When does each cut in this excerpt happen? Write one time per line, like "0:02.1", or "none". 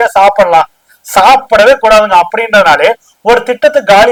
none